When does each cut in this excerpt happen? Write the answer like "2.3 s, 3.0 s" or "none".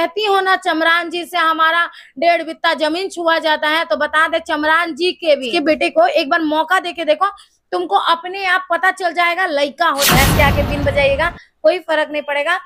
5.5 s, 10.1 s